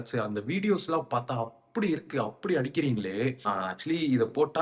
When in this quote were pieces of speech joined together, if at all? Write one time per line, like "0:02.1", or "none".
0:03.4

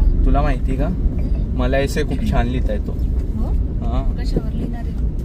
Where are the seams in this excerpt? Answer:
none

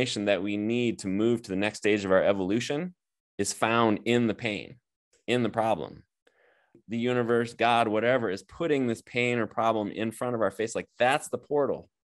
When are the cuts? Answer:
0:06.8

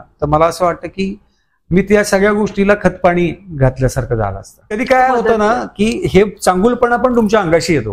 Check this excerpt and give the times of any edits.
0:04.8

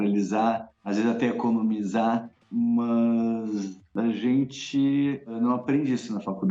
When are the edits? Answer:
0:05.3

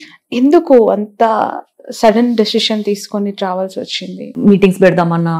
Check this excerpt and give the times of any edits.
0:04.3

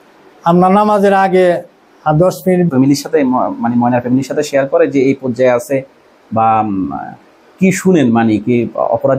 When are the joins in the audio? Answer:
0:02.7

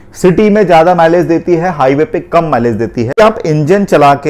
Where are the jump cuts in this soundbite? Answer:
0:03.2

